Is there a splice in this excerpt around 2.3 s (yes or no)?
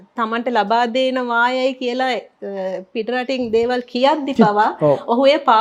no